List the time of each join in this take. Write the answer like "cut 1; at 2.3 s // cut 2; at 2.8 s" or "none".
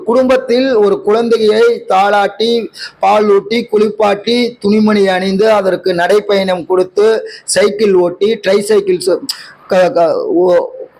none